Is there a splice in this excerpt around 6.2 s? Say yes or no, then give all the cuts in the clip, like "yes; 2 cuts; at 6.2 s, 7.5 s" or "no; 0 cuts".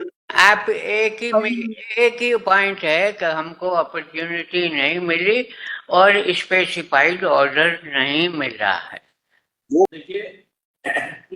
no; 1 cut; at 9.9 s